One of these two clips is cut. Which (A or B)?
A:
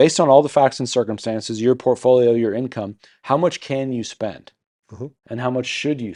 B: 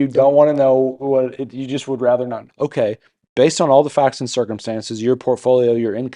B